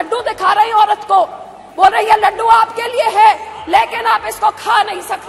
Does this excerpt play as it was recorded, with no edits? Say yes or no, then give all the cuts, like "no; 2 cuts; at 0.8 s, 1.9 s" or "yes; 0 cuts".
yes; 0 cuts